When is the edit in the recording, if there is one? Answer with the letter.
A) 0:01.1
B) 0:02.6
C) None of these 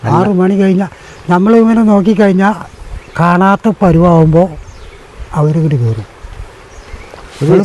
C